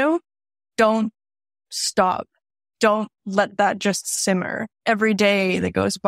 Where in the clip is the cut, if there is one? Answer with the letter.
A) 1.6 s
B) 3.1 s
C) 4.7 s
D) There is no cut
C